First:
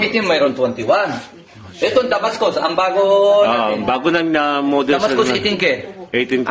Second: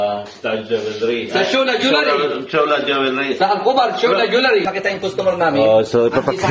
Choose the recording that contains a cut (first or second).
second